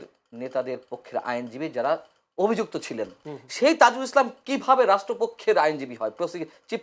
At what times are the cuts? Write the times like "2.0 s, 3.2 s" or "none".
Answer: none